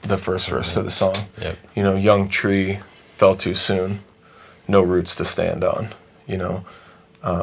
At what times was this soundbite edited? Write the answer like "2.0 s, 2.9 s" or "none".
none